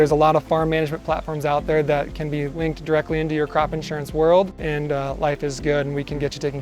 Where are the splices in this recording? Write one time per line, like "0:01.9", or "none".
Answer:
0:02.5
0:04.7